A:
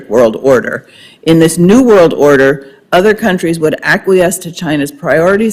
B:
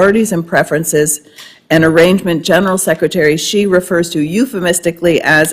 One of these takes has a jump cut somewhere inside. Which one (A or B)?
B